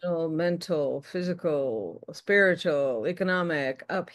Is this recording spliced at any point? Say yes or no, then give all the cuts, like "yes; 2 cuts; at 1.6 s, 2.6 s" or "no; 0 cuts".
no; 0 cuts